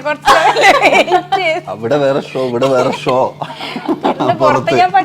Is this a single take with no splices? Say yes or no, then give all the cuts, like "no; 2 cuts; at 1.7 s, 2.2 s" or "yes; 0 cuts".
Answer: yes; 0 cuts